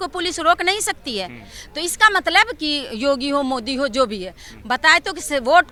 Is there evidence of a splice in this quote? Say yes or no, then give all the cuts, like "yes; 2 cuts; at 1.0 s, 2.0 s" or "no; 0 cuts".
no; 0 cuts